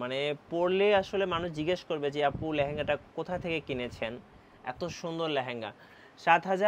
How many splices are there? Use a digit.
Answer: 0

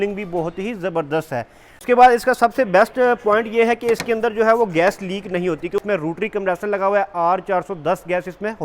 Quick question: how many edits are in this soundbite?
2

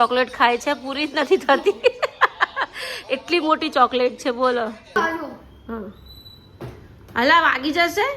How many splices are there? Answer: 1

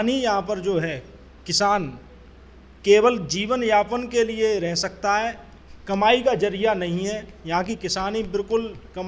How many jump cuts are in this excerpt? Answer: 0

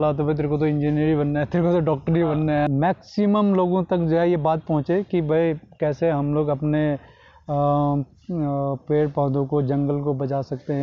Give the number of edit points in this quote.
1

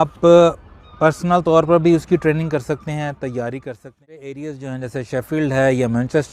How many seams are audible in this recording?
1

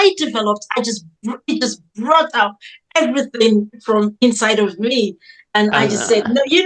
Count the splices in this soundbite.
0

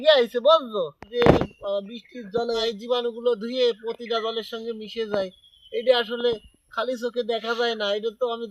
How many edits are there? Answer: 2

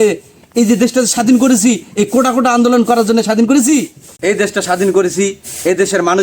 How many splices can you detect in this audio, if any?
1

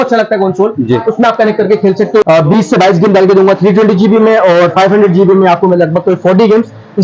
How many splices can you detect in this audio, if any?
1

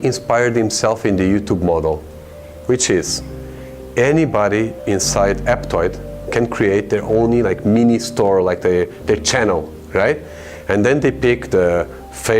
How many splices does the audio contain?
1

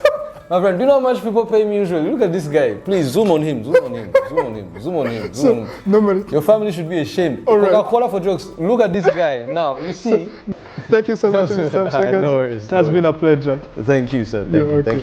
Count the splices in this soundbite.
0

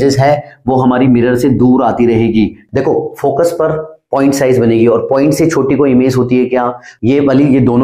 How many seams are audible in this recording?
2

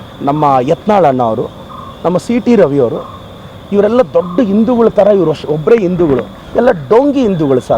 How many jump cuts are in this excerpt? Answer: 0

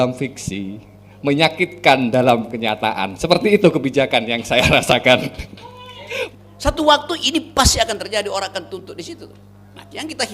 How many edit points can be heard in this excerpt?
1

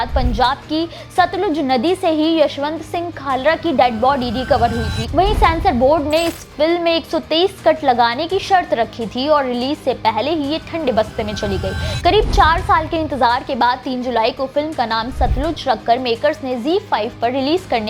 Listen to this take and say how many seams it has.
1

